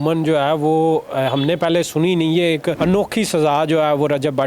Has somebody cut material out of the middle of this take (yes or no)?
yes